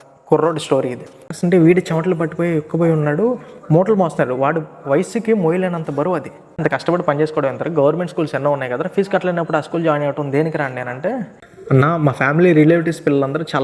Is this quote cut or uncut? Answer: cut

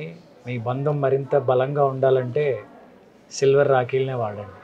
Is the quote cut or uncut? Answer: uncut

